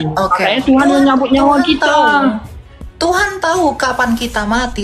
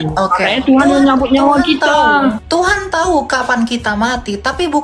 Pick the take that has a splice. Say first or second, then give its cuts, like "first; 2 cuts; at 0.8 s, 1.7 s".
second; 1 cut; at 2.4 s